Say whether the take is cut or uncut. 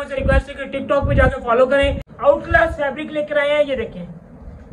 cut